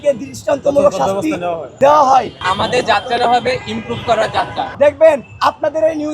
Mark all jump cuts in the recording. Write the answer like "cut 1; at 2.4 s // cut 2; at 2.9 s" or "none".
cut 1; at 1.7 s // cut 2; at 2.5 s // cut 3; at 4.7 s